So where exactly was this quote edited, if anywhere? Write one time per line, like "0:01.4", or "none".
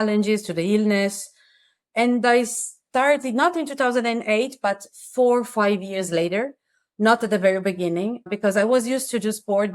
0:08.3